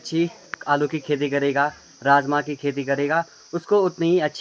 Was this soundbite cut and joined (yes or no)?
no